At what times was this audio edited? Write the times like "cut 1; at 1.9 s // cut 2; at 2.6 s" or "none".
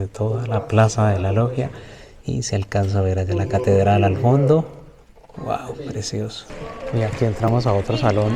none